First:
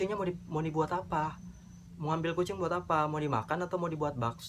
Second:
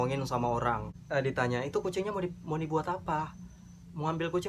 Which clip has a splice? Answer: second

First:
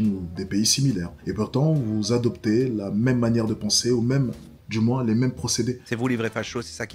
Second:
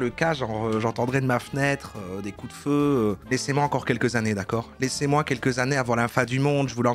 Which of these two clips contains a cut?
first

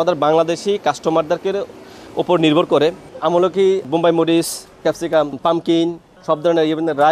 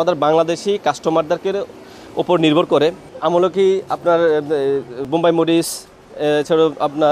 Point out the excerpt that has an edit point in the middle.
first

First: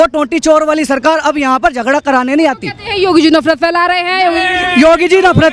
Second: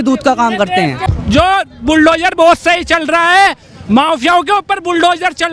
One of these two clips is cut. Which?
second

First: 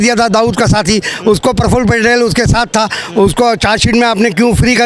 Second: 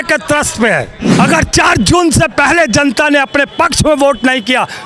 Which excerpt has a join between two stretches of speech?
second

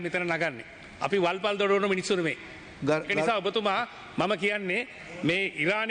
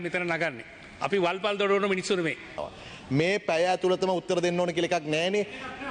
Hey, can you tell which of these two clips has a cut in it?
second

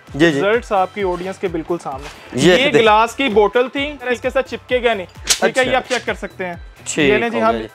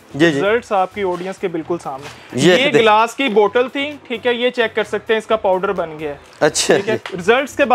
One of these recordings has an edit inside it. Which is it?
first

